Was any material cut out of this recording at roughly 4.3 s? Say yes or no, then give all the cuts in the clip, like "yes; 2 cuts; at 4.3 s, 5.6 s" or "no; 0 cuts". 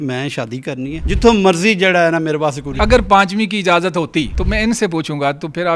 yes; 3 cuts; at 1.0 s, 2.8 s, 4.3 s